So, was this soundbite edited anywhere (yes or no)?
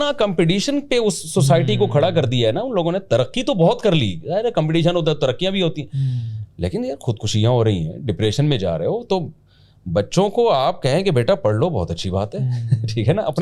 no